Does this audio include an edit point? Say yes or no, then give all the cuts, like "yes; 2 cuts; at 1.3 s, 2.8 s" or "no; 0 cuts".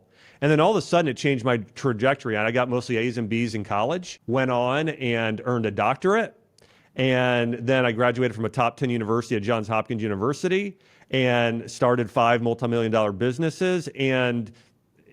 yes; 1 cut; at 4.1 s